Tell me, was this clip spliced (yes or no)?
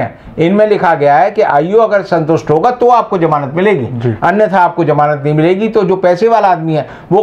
no